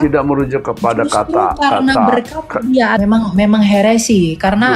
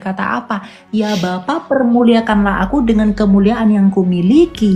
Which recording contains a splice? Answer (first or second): first